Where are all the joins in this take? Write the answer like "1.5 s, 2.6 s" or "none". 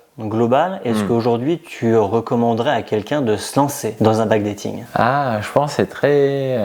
none